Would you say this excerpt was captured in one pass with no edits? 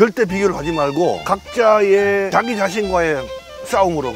no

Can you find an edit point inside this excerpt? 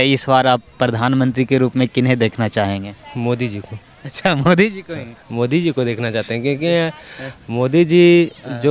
no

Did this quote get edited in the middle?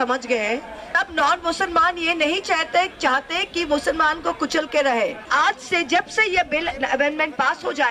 yes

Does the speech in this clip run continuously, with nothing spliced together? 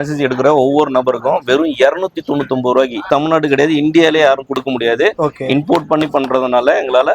no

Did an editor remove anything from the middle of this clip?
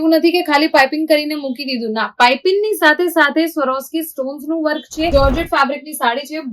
yes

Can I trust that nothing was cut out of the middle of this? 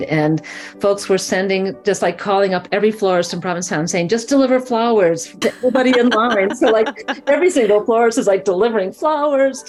yes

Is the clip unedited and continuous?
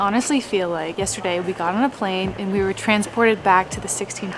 no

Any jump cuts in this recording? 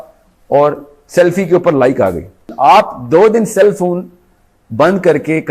yes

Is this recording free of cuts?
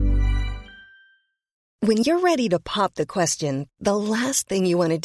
no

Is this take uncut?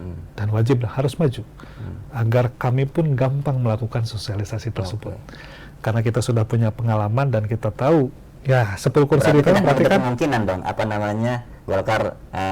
no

